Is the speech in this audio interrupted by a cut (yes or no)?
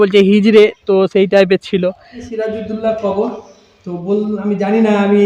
yes